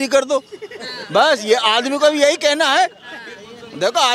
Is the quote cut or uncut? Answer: uncut